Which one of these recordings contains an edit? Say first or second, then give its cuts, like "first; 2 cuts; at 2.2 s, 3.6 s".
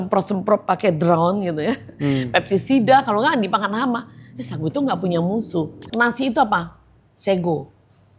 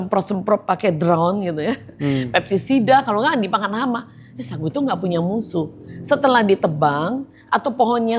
first; 1 cut; at 5.9 s